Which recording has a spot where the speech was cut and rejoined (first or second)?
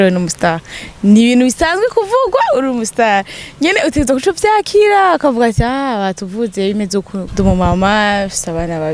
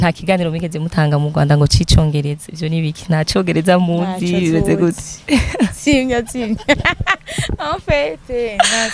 first